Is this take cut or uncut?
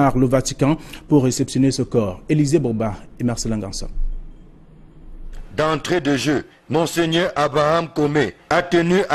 cut